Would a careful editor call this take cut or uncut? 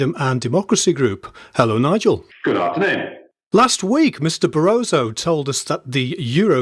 uncut